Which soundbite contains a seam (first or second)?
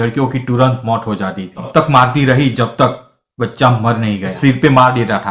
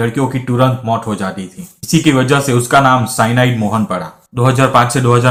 first